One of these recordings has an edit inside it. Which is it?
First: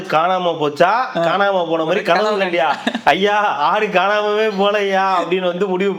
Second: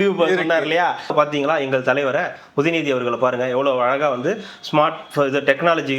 second; 1 cut; at 1.1 s

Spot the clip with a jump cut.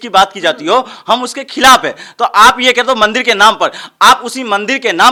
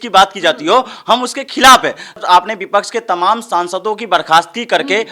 second; 1 cut; at 2.2 s

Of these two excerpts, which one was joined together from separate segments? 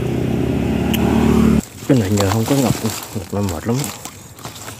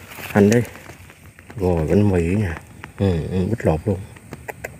first; 1 cut; at 1.6 s

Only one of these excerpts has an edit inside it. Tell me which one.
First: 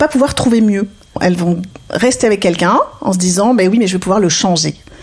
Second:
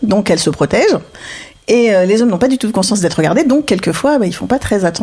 first; 1 cut; at 1.2 s

